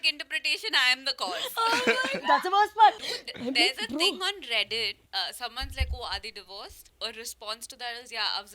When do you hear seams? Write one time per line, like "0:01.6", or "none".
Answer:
0:03.0
0:05.0
0:06.8